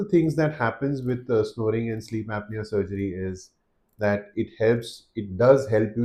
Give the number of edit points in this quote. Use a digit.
0